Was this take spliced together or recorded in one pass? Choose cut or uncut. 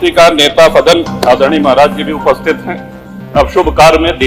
uncut